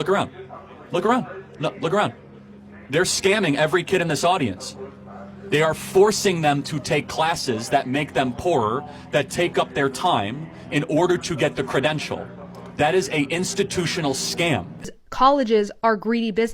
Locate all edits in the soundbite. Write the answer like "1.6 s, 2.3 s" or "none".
14.9 s

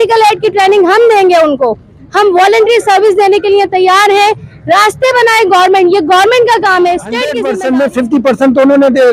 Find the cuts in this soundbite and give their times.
7.3 s

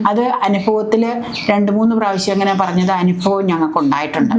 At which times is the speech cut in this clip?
none

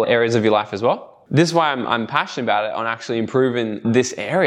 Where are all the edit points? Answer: 1.2 s

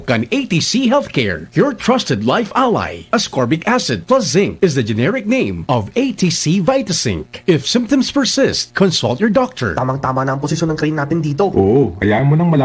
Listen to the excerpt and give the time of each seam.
none

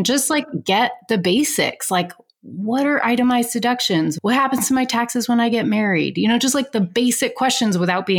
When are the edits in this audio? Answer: 4.2 s

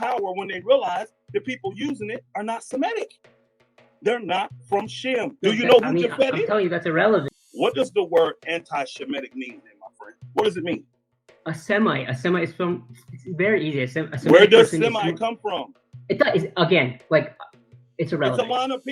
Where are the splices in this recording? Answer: 7.4 s

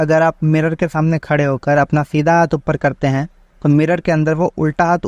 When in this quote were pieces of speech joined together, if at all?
none

